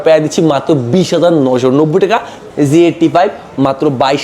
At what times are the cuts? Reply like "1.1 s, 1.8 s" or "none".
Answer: 2.4 s